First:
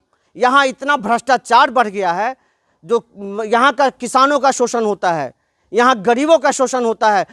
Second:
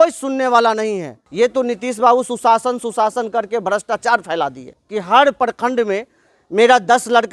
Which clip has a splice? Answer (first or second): second